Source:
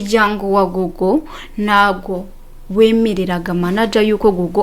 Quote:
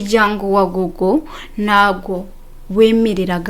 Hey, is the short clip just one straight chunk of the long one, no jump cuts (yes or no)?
yes